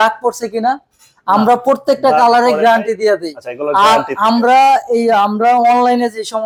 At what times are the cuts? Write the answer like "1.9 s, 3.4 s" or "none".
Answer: none